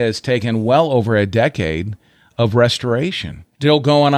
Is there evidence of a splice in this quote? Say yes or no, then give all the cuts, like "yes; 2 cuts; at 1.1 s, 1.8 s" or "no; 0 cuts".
no; 0 cuts